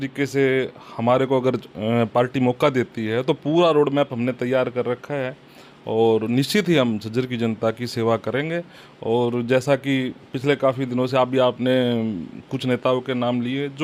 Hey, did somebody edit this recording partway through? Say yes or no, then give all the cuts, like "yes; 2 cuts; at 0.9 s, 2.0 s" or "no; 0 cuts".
no; 0 cuts